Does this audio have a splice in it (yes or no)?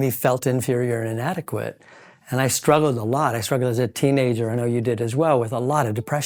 no